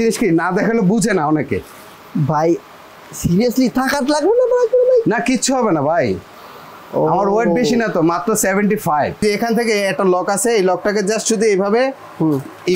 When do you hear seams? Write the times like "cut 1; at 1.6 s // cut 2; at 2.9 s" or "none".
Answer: cut 1; at 9.2 s